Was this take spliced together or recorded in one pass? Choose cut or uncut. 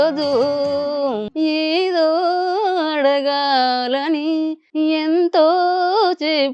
cut